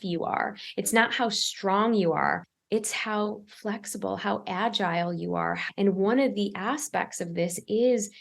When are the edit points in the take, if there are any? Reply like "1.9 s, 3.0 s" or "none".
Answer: 2.5 s, 5.6 s